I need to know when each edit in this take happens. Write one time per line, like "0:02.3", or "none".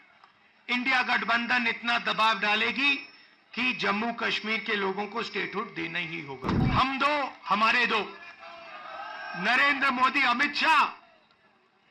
0:06.6